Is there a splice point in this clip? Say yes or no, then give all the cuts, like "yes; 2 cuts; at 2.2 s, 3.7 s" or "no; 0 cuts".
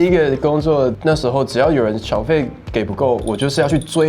yes; 1 cut; at 1.0 s